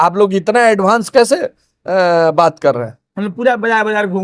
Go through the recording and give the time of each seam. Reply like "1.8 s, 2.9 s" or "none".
none